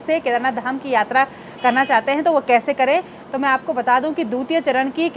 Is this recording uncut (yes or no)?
yes